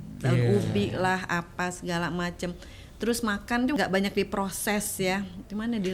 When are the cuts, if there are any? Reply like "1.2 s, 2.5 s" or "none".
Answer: 3.8 s